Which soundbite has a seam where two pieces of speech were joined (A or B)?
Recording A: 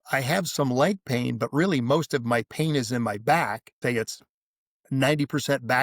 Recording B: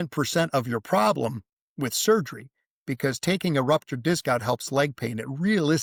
A